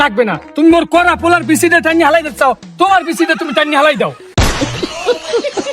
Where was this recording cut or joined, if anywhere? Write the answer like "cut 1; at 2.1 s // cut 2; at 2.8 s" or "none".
cut 1; at 4.3 s